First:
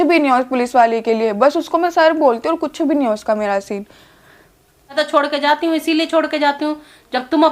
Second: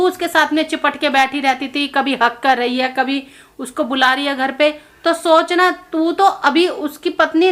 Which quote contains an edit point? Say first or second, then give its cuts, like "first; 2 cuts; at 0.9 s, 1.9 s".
first; 1 cut; at 5.0 s